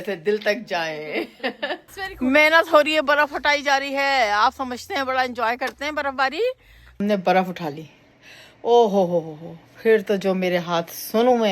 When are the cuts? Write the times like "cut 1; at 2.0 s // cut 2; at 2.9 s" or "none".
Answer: cut 1; at 1.9 s // cut 2; at 7.0 s